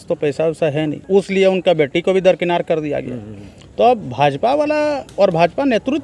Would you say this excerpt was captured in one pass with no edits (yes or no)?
no